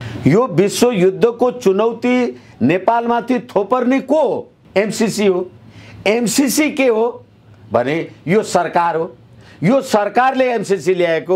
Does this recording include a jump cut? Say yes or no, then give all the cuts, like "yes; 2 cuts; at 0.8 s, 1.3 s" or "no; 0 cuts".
yes; 1 cut; at 4.6 s